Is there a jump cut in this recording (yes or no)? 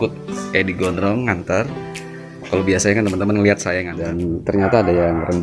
yes